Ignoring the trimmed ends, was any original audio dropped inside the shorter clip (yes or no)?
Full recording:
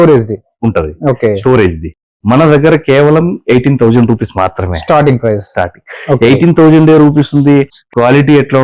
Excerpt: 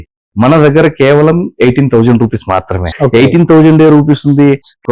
yes